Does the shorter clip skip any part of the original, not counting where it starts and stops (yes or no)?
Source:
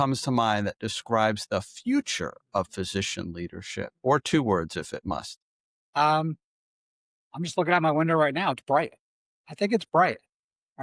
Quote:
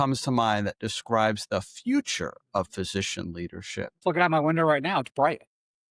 yes